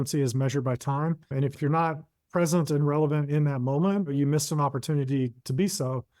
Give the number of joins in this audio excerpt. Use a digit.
2